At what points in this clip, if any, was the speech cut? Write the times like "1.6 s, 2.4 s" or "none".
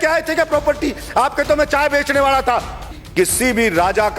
3.0 s